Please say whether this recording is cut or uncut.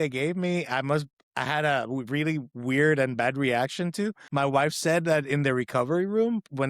cut